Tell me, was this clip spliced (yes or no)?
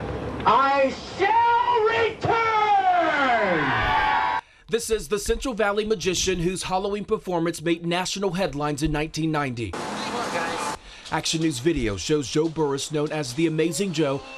no